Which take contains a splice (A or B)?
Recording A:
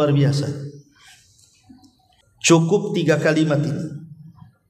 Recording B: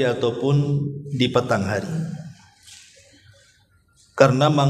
A